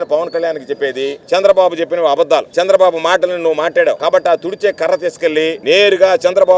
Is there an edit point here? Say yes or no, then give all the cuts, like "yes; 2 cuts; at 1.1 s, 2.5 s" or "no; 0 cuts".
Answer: yes; 4 cuts; at 1.2 s, 2.5 s, 4.0 s, 5.6 s